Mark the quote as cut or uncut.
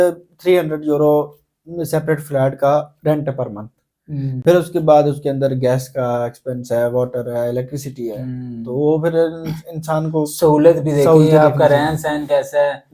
uncut